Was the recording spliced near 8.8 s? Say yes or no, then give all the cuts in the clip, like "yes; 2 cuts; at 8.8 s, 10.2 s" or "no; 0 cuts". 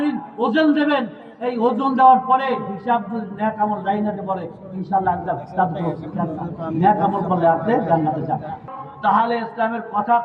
yes; 1 cut; at 8.8 s